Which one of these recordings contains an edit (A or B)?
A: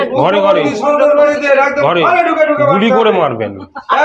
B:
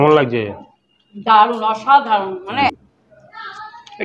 B